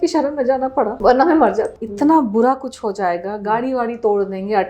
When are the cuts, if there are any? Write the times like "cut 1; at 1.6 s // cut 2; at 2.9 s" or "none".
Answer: cut 1; at 0.9 s // cut 2; at 1.8 s